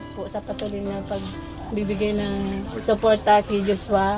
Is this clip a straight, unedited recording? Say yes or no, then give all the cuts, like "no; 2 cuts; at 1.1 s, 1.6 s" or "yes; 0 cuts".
no; 1 cut; at 2.8 s